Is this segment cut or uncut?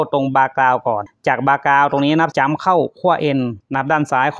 cut